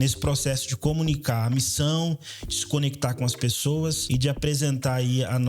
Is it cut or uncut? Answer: cut